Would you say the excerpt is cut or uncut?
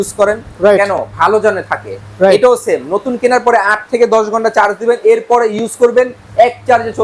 uncut